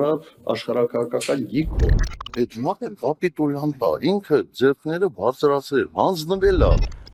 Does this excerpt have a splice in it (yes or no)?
no